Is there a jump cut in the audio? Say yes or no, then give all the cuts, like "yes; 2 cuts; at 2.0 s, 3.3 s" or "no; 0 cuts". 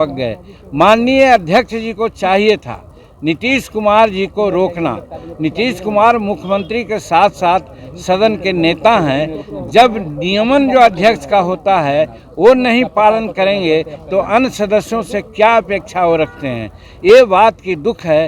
no; 0 cuts